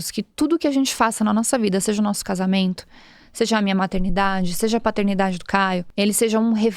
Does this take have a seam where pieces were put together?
yes; 1 cut; at 5.9 s

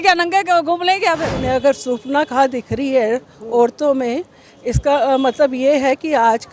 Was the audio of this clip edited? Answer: yes; 1 cut; at 1.4 s

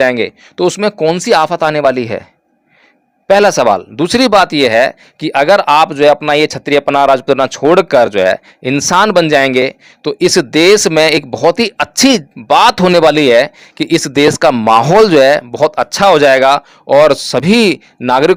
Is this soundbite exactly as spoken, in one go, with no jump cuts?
yes; 0 cuts

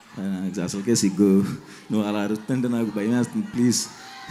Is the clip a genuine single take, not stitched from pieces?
yes; 0 cuts

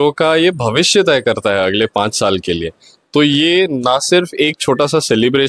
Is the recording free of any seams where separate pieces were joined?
yes; 0 cuts

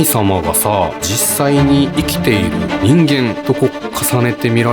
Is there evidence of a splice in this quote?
yes; 3 cuts; at 1.1 s, 2.7 s, 3.4 s

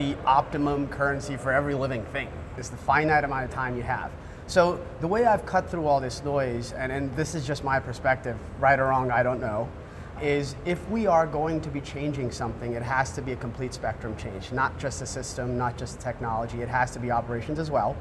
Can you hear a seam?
no; 0 cuts

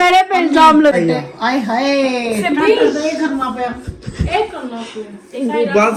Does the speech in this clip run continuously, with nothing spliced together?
no; 1 cut; at 0.9 s

